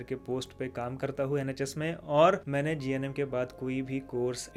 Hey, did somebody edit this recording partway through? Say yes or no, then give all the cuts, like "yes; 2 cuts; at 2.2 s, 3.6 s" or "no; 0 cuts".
no; 0 cuts